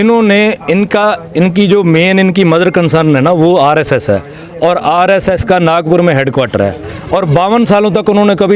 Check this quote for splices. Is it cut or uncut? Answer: uncut